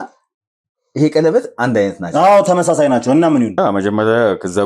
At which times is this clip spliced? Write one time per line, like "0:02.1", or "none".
0:03.6